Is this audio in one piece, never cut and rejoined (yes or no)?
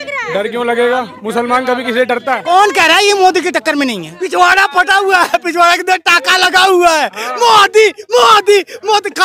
no